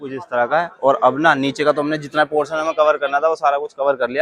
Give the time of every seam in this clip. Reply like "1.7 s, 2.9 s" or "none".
none